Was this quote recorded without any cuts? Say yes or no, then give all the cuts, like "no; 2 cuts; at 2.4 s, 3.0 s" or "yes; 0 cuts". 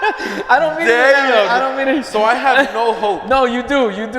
yes; 0 cuts